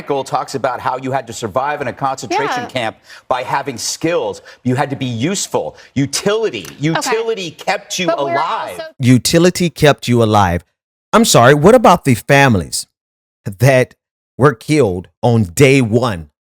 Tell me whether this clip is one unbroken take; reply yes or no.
yes